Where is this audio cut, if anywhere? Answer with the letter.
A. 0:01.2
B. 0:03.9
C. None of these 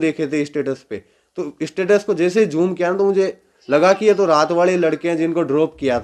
C